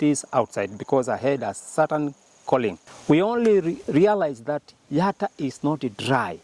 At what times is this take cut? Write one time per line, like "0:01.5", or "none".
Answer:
0:02.9